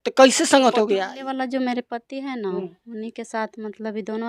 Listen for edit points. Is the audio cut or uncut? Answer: cut